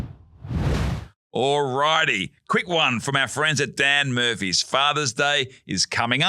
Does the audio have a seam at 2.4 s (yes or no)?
no